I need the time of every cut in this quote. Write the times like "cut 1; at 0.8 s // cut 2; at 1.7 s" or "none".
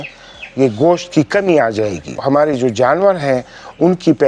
cut 1; at 2.2 s